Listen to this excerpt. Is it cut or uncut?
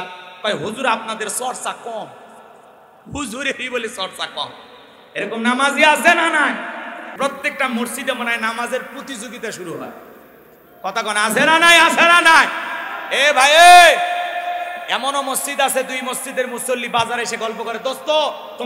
cut